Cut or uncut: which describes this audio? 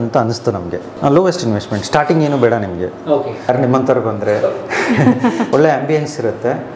cut